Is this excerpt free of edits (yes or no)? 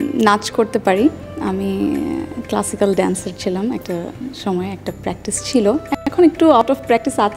yes